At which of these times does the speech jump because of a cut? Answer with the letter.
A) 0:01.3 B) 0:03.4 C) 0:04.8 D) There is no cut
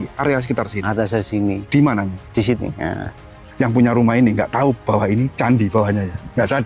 B